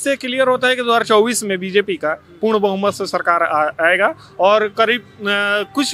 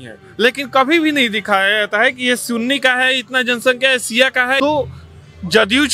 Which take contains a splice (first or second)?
second